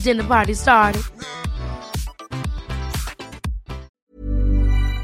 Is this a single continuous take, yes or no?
no